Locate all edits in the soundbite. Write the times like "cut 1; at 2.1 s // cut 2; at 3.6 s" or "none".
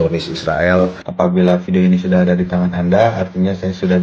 cut 1; at 1.0 s